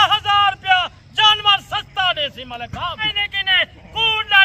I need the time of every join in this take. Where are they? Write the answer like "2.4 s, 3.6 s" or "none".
3.1 s